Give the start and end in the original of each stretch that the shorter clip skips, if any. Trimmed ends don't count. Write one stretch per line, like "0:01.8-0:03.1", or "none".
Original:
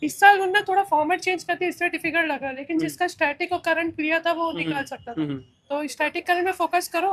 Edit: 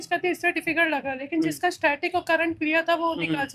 none